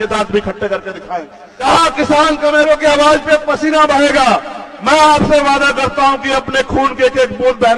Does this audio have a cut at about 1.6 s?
yes; 1 cut; at 1.6 s

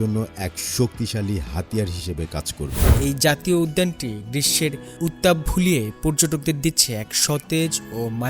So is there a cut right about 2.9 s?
yes; 1 cut; at 2.9 s

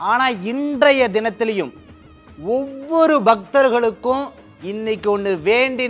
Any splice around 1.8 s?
no; 0 cuts

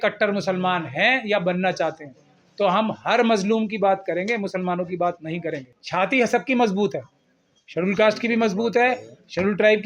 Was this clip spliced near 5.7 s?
yes; 1 cut; at 5.7 s

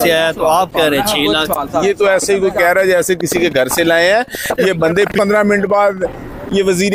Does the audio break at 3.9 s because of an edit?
no; 1 cut; at 5.1 s

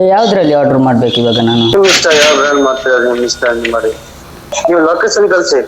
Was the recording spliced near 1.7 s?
yes; 2 cuts; at 1.7 s, 4.6 s

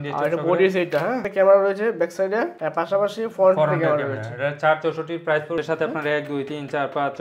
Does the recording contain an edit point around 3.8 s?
no; 2 cuts; at 1.2 s, 5.6 s

